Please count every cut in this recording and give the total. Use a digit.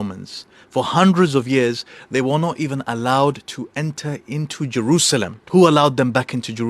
1